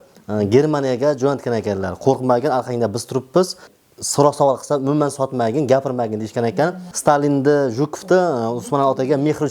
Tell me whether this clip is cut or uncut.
cut